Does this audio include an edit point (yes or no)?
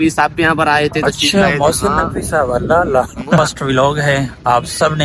yes